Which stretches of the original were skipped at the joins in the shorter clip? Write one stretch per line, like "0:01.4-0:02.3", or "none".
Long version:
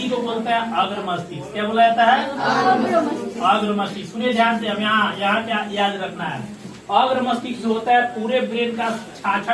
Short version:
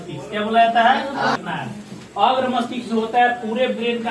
0:02.6-0:06.1